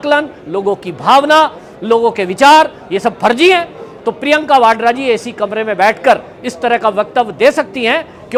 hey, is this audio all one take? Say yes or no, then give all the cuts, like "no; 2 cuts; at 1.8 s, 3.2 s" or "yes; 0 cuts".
yes; 0 cuts